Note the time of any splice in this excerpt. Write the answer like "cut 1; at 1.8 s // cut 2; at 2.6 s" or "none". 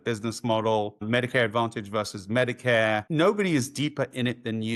none